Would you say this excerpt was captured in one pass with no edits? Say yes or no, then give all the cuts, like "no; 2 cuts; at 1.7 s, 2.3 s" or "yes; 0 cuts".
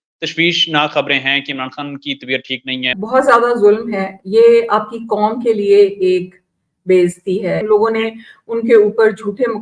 no; 2 cuts; at 2.9 s, 7.6 s